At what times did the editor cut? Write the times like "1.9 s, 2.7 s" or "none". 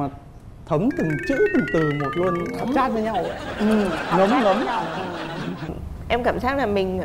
5.8 s